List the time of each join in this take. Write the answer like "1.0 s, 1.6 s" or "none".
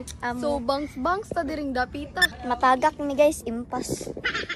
2.3 s

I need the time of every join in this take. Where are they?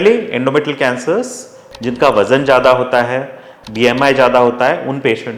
1.6 s, 3.5 s

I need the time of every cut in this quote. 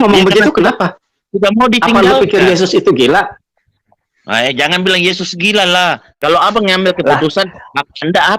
6.1 s

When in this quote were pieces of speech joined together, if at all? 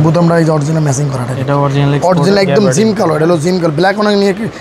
none

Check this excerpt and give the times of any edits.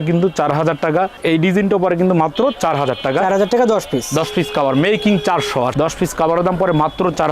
1.2 s, 5.7 s

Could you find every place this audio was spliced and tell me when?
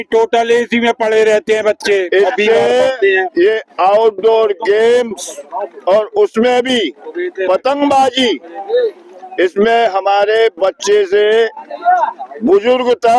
none

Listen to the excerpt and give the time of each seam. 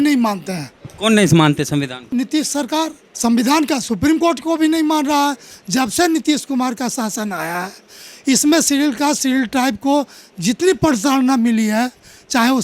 2.0 s, 3.0 s, 5.5 s

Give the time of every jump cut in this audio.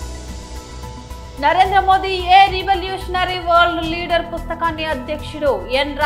1.1 s

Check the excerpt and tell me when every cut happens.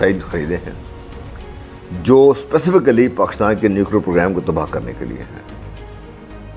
none

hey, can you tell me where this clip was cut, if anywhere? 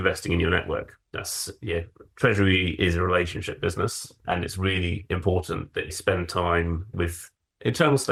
none

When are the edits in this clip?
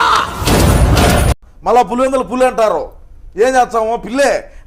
1.4 s

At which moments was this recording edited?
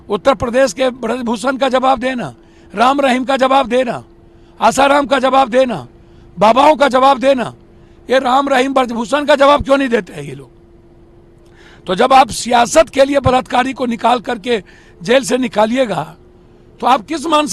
none

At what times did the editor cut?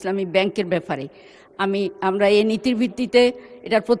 none

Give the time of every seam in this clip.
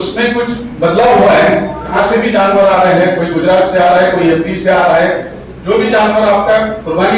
1.9 s

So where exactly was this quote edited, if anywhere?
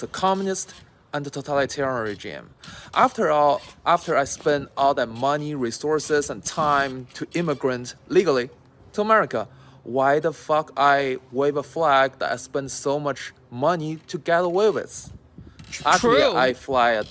14.4 s

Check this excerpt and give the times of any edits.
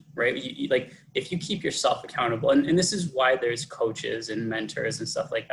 none

